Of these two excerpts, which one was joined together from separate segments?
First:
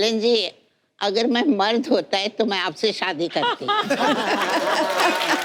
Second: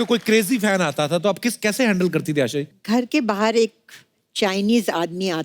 second; 1 cut; at 2.7 s

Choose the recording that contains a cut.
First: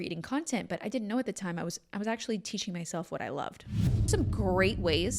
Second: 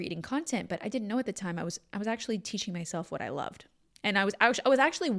first; 1 cut; at 4.1 s

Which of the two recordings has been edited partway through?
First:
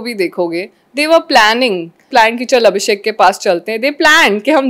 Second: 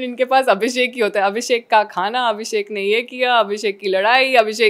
first; 1 cut; at 2.1 s

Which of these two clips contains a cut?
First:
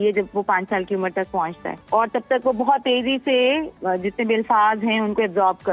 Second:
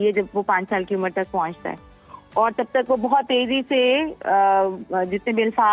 first; 2 cuts; at 1.7 s, 3.7 s

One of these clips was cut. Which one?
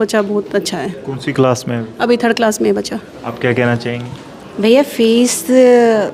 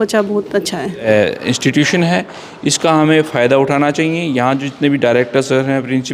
second; 1 cut; at 1.0 s

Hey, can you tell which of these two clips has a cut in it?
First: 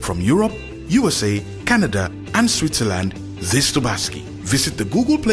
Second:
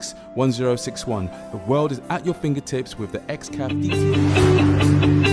second; 1 cut; at 3.7 s

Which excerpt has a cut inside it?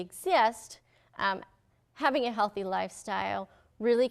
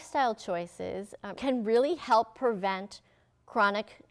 second; 1 cut; at 1.3 s

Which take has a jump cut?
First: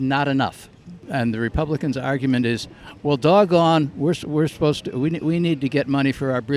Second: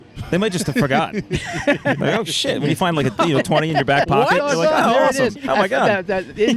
first; 1 cut; at 1.0 s

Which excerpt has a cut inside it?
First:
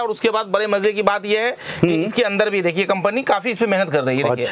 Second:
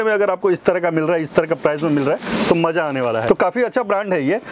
second; 1 cut; at 3.2 s

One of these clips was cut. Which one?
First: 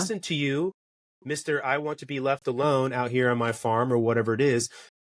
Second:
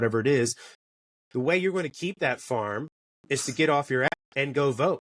second; 1 cut; at 4.1 s

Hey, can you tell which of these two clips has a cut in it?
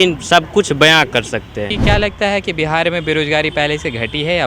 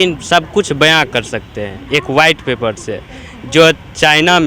first; 1 cut; at 1.7 s

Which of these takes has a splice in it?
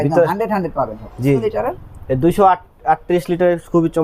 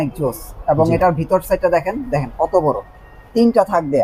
first; 1 cut; at 1.4 s

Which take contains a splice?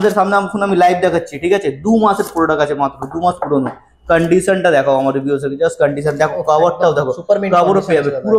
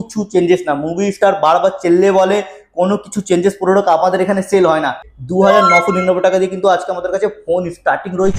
second; 1 cut; at 5.1 s

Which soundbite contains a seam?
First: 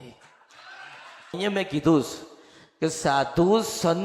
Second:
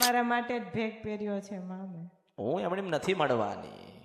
first; 1 cut; at 1.3 s

